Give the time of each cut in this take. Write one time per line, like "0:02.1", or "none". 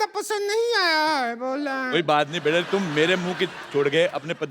0:02.7

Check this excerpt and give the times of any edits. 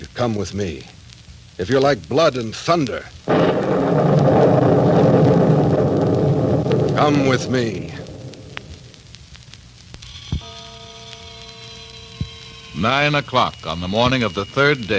0:12.6

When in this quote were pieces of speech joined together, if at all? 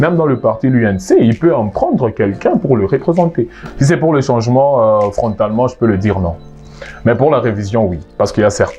0:03.6

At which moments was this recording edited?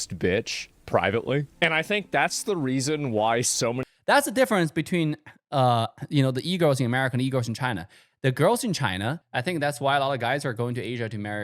0:03.9
0:09.2

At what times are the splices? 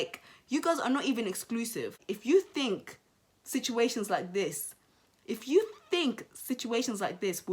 0:01.9

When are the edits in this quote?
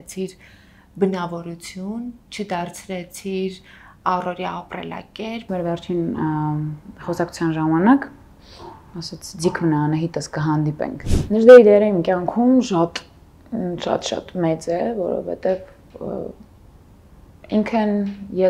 0:05.5
0:11.1

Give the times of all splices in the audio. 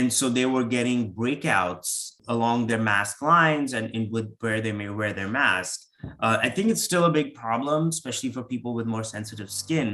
0:02.2

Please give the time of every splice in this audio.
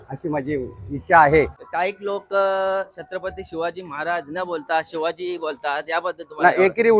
0:01.6

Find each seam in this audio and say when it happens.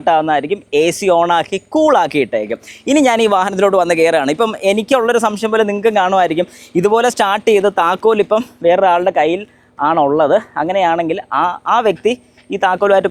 none

